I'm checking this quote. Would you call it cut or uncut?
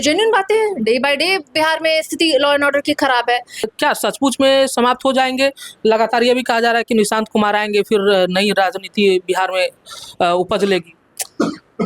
cut